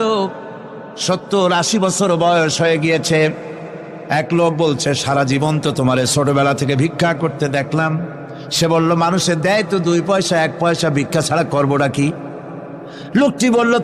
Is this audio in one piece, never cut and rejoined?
yes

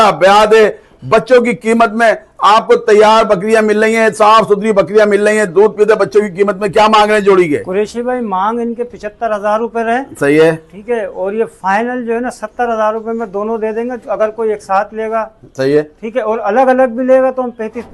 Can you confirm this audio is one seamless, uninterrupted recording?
yes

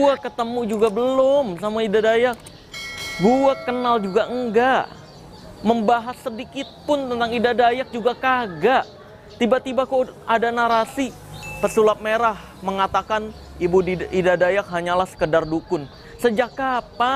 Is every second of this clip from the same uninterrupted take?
yes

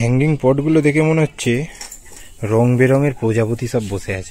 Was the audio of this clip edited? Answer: no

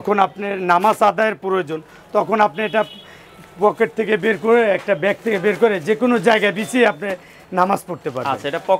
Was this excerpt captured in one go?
yes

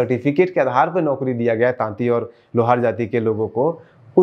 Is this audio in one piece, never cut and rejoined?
yes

